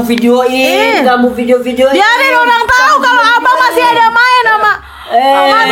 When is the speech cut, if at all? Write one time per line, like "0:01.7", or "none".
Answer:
none